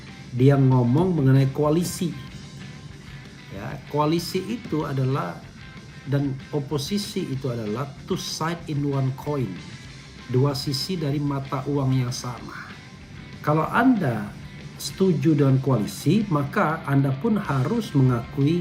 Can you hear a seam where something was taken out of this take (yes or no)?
no